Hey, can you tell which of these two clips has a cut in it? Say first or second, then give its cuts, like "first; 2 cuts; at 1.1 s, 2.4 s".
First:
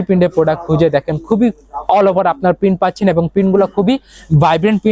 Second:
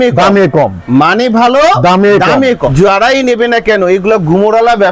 second; 1 cut; at 2.7 s